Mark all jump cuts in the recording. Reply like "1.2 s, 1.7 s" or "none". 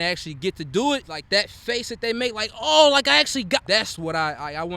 1.1 s, 3.6 s

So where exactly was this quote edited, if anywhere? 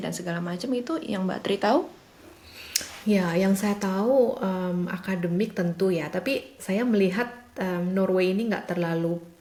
none

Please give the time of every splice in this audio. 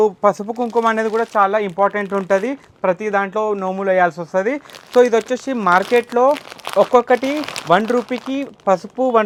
none

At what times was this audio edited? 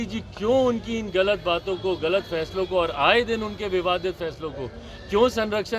none

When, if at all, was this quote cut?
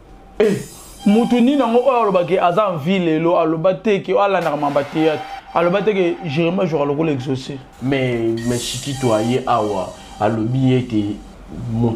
7.6 s

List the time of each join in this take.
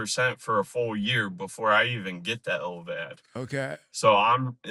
none

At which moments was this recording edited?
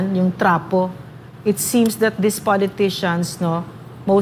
none

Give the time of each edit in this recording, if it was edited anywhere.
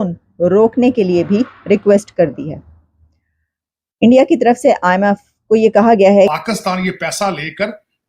6.3 s

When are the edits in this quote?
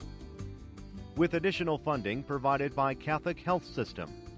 1.0 s

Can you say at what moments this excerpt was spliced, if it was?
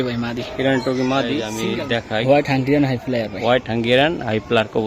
1.5 s

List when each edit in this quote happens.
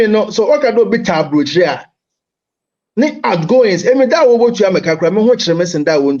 none

